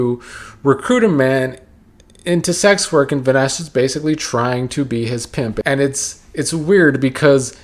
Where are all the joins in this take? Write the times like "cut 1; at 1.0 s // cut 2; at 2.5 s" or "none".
cut 1; at 5.6 s

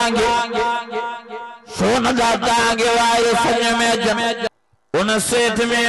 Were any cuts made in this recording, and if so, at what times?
cut 1; at 4.5 s

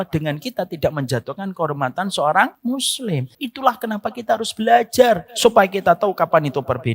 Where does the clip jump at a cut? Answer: cut 1; at 3.0 s // cut 2; at 5.3 s

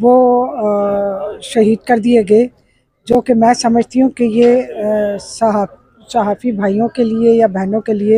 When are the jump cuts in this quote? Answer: none

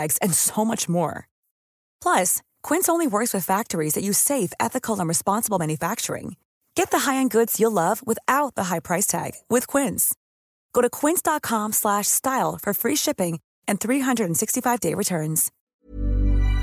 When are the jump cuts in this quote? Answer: cut 1; at 15.7 s

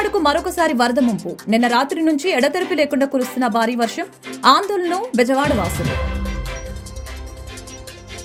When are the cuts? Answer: none

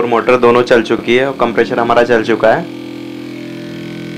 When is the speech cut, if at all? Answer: none

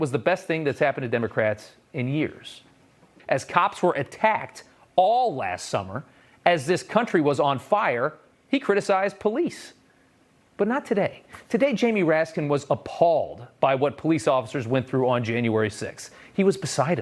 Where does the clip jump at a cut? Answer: cut 1; at 3.2 s

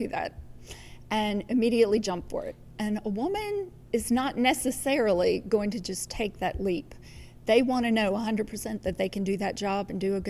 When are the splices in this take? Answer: cut 1; at 3.8 s

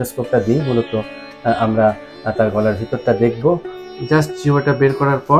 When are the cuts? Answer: cut 1; at 3.8 s

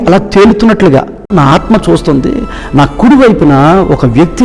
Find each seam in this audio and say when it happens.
cut 1; at 1.3 s

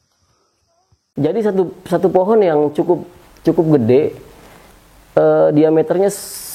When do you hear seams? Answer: cut 1; at 0.9 s

